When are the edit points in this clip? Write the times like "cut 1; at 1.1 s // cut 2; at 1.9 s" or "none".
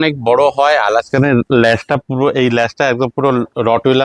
none